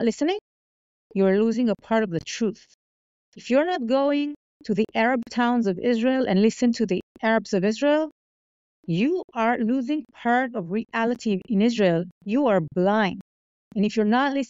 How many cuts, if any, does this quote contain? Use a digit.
0